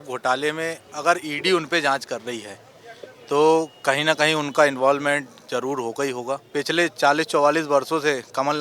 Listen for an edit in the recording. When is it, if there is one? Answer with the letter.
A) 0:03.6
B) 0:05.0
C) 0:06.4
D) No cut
C